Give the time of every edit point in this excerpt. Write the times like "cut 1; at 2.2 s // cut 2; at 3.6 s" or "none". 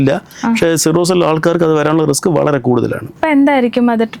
none